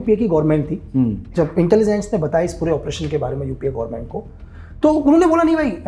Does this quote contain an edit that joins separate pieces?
no; 0 cuts

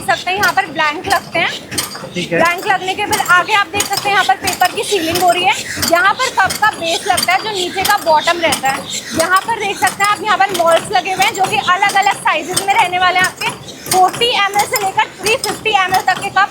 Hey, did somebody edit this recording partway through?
no; 0 cuts

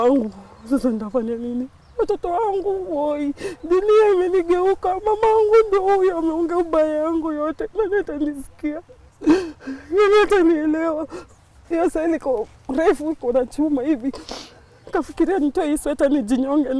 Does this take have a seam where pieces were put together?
no; 0 cuts

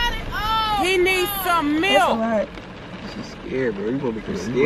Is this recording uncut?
yes; 0 cuts

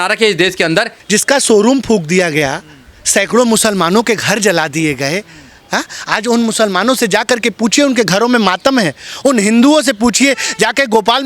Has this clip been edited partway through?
yes; 1 cut; at 1.0 s

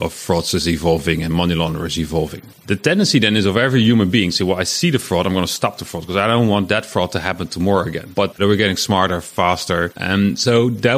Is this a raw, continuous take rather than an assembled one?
no; 3 cuts; at 2.4 s, 8.2 s, 10.0 s

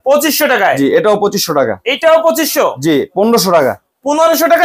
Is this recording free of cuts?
yes; 0 cuts

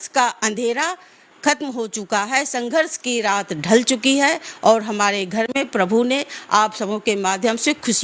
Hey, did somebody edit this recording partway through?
no; 0 cuts

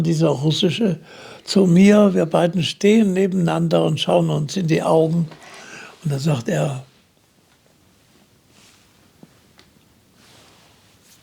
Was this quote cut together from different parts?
no; 0 cuts

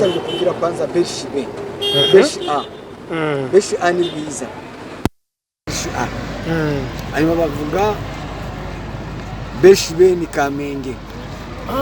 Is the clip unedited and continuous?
yes; 0 cuts

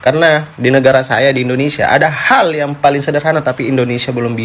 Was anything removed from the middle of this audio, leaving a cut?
no; 0 cuts

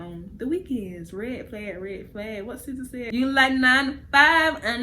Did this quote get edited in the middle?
yes; 1 cut; at 3.0 s

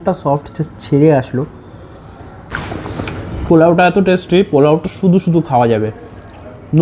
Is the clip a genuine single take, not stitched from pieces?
no; 1 cut; at 2.5 s

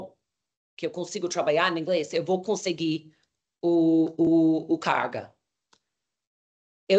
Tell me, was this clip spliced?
no; 0 cuts

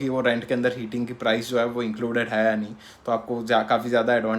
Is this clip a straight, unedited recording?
yes; 0 cuts

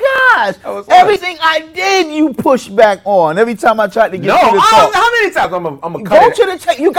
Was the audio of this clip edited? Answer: no; 0 cuts

